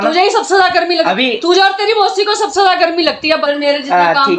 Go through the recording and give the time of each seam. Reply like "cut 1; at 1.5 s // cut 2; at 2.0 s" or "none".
cut 1; at 3.4 s